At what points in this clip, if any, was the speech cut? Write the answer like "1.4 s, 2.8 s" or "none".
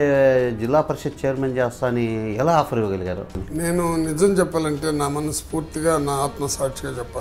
3.3 s